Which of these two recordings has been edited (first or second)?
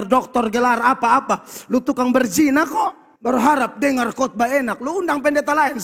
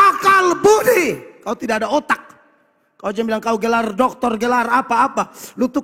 first